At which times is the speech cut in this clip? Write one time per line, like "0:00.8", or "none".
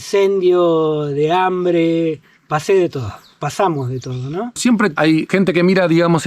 none